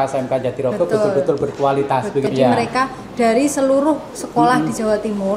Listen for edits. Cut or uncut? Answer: cut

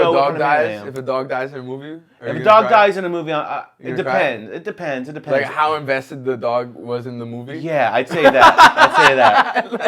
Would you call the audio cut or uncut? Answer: uncut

